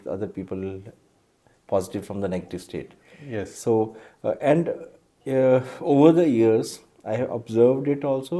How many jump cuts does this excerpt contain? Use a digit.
0